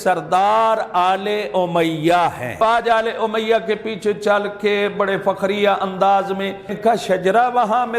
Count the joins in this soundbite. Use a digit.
2